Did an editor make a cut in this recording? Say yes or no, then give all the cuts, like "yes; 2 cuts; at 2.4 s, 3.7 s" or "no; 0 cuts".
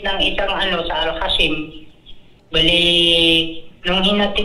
no; 0 cuts